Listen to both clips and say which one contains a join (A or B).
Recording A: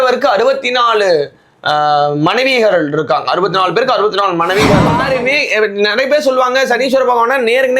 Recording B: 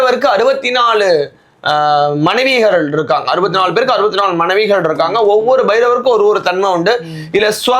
A